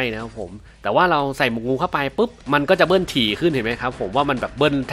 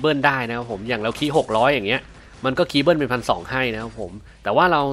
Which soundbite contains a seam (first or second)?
first